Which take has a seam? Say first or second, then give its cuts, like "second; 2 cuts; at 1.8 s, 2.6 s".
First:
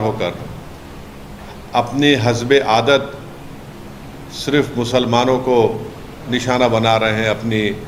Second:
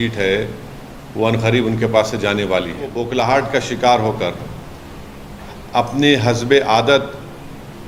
second; 1 cut; at 3.0 s